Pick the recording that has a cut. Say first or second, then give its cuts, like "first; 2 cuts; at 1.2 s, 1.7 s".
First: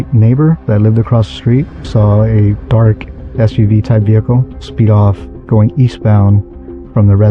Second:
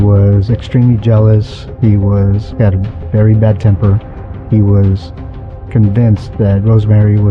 first; 2 cuts; at 1.8 s, 5.3 s